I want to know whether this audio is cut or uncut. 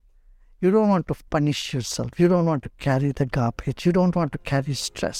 uncut